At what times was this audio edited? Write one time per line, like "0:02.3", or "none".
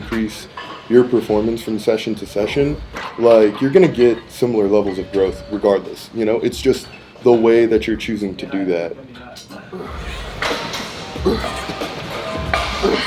none